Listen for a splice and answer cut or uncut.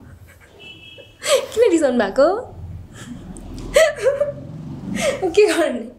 uncut